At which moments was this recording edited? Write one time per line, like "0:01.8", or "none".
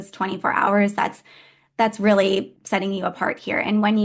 0:02.6

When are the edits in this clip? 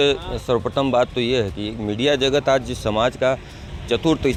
none

